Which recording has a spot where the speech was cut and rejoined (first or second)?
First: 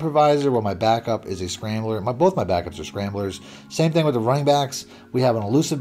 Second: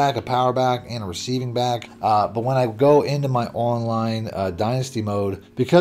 second